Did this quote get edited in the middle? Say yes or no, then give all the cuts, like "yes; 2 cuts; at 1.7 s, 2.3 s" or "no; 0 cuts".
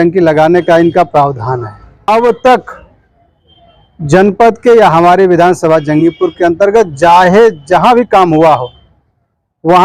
yes; 1 cut; at 1.9 s